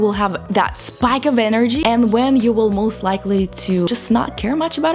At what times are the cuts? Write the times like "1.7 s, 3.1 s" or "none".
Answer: 1.8 s, 3.9 s